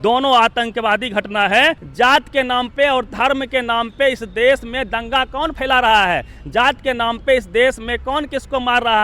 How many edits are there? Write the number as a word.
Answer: one